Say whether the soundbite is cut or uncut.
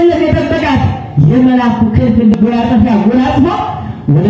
cut